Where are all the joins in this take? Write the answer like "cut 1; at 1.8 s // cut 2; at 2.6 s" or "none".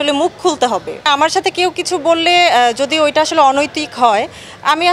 cut 1; at 1.1 s